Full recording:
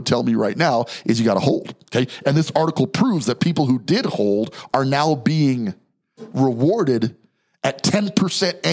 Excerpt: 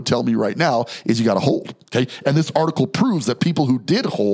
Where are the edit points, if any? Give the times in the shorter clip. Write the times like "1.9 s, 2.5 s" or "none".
none